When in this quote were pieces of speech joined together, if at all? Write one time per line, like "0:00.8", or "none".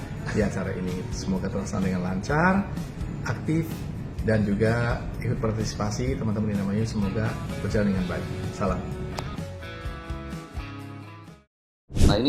none